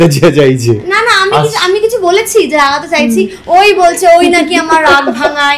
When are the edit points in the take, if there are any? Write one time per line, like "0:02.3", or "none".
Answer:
none